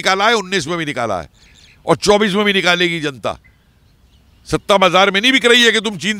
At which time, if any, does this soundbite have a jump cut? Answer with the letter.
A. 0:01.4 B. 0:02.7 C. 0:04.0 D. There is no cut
D